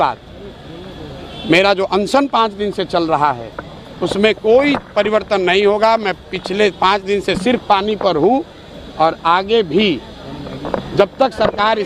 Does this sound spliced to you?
no; 0 cuts

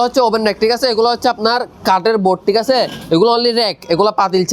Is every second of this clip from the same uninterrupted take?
yes; 0 cuts

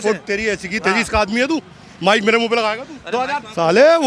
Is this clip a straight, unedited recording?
yes; 0 cuts

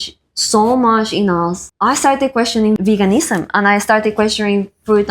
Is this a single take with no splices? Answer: no; 2 cuts; at 1.6 s, 2.8 s

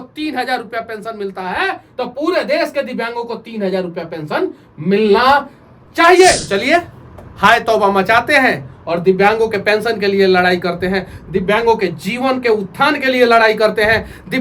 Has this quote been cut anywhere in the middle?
yes; 1 cut; at 6.4 s

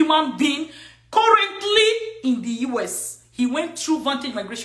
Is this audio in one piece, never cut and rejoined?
yes; 0 cuts

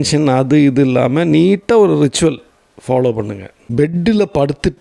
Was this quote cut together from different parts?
yes; 1 cut; at 3.5 s

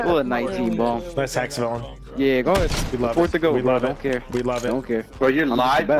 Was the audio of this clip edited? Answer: no; 0 cuts

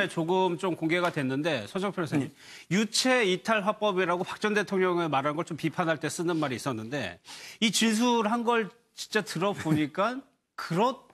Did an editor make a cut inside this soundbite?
no; 0 cuts

